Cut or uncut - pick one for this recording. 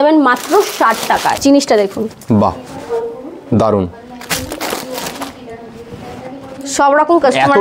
cut